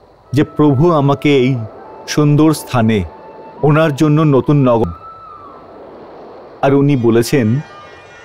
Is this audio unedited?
no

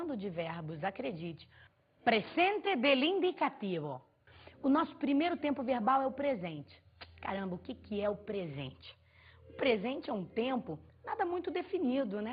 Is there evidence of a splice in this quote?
yes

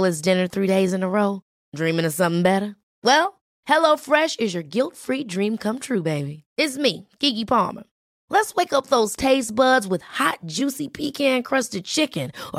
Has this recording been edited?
no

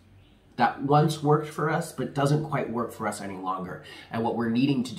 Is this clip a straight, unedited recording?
yes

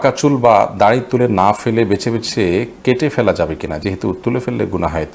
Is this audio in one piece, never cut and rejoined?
yes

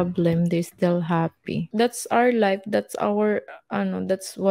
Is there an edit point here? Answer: yes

